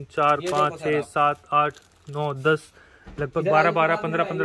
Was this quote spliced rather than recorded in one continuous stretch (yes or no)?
no